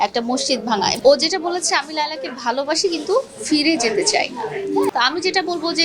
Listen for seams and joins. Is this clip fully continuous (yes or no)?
no